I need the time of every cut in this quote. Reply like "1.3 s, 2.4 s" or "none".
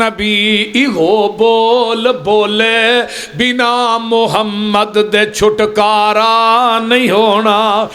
none